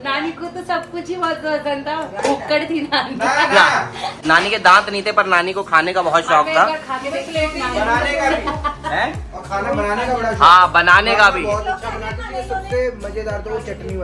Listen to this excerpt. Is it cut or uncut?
uncut